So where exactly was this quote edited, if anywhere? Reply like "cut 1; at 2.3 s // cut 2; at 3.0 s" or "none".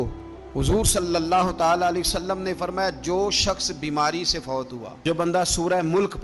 cut 1; at 5.0 s

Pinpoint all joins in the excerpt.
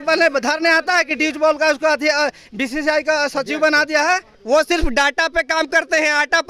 cut 1; at 4.3 s

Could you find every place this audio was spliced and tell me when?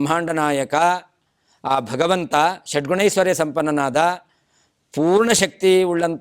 none

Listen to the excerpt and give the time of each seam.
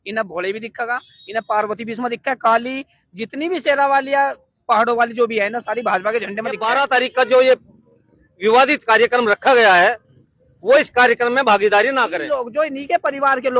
cut 1; at 6.6 s // cut 2; at 12.2 s

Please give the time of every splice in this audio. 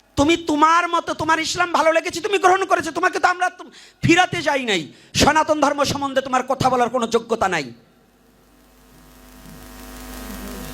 none

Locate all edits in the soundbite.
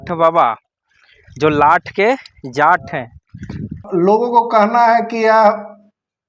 cut 1; at 3.8 s

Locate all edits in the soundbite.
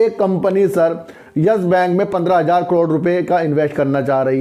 none

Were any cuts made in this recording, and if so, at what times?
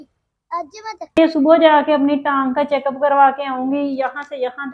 cut 1; at 1.3 s

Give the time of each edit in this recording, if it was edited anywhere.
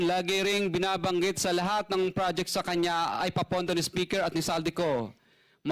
none

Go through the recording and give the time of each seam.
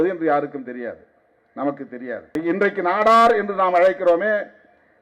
cut 1; at 2.3 s

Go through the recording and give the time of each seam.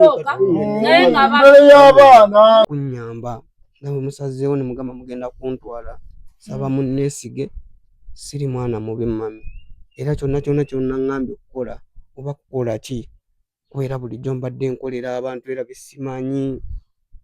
cut 1; at 2.7 s

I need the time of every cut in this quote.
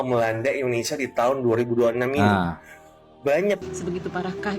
cut 1; at 3.6 s

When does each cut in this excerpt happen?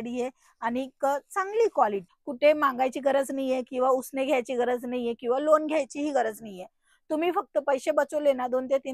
cut 1; at 2.1 s

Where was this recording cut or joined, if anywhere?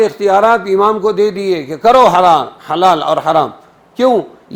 none

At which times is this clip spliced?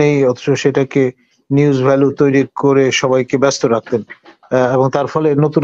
none

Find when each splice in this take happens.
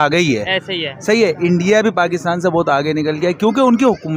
none

